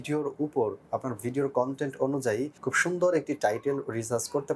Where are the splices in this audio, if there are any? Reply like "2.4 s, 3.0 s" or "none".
2.6 s